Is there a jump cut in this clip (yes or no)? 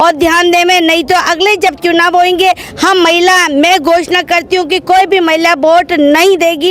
no